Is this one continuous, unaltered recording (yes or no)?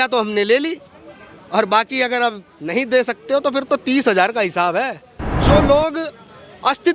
no